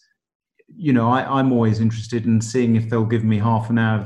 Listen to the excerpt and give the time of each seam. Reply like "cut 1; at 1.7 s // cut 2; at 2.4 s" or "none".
none